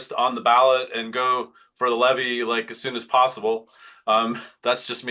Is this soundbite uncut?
yes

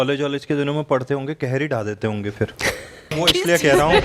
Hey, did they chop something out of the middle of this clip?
yes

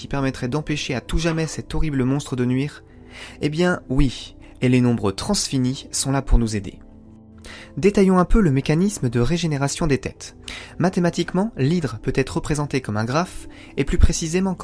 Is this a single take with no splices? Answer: no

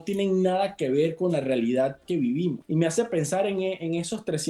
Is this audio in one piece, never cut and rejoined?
no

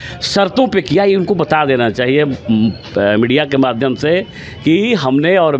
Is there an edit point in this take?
no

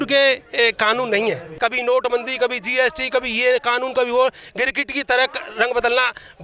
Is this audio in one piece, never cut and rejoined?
no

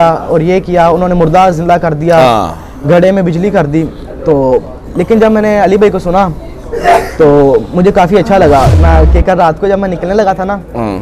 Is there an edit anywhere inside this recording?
yes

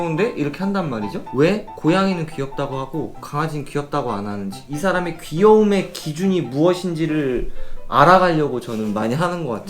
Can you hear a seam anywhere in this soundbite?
yes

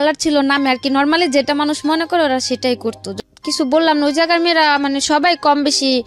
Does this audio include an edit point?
yes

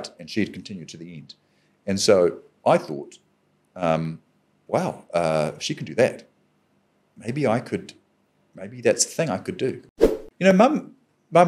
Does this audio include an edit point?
yes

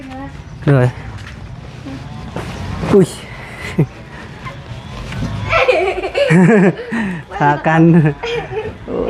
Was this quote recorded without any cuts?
no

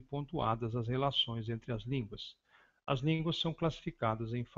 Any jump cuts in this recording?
yes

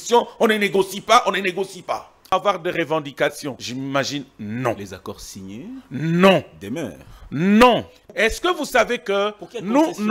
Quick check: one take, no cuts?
no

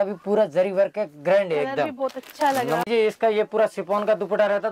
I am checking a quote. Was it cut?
yes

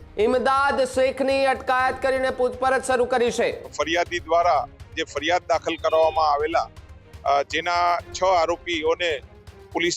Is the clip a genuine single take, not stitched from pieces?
no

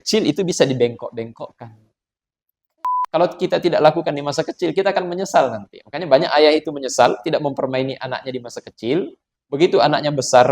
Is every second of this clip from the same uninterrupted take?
no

